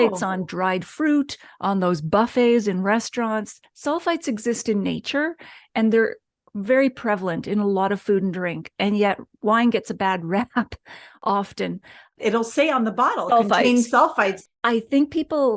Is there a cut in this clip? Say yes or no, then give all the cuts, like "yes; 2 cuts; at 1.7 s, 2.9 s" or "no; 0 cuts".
yes; 2 cuts; at 12.2 s, 14.4 s